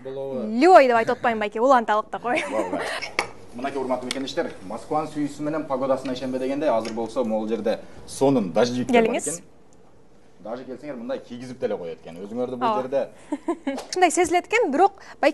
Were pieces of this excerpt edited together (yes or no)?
yes